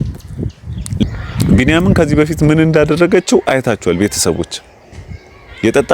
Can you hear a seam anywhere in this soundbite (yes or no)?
yes